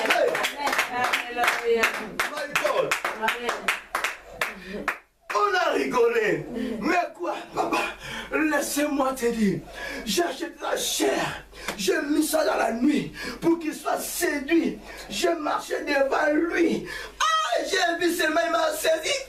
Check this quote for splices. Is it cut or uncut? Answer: uncut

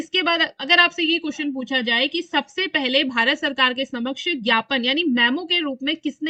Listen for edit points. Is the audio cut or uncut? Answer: uncut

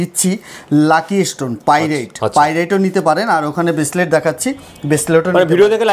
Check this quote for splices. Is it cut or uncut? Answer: uncut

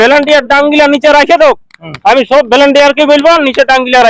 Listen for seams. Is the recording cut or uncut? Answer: uncut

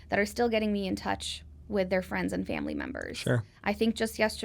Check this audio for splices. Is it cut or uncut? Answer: uncut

